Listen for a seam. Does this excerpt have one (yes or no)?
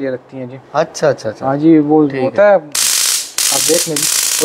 no